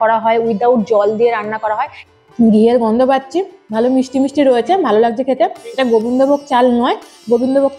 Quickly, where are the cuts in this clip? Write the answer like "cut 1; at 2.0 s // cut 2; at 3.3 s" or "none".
cut 1; at 2.0 s